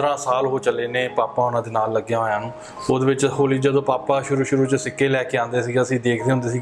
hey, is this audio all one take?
yes; 0 cuts

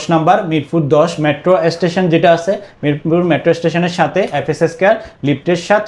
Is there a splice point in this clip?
no; 0 cuts

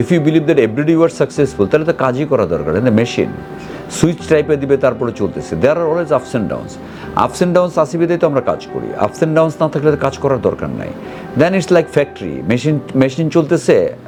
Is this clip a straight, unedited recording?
yes; 0 cuts

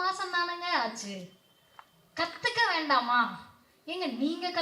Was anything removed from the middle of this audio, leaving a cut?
no; 0 cuts

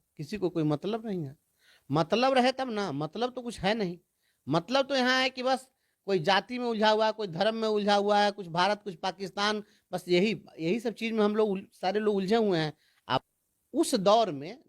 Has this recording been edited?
yes; 1 cut; at 13.2 s

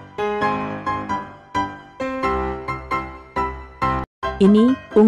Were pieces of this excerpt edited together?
yes; 2 cuts; at 3.5 s, 4.1 s

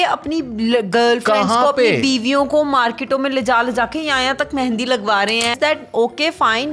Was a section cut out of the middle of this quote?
yes; 1 cut; at 5.5 s

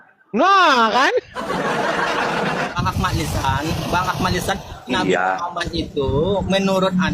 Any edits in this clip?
yes; 1 cut; at 2.7 s

